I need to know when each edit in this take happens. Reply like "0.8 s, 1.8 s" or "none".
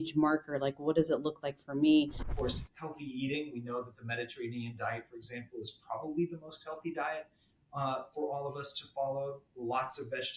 2.2 s